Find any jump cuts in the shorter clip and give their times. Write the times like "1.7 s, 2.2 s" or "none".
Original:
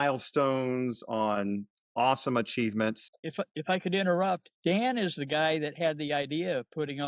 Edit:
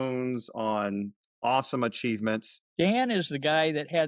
2.6 s